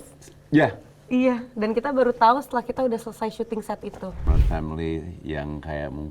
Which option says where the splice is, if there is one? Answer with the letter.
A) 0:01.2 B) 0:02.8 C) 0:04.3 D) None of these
C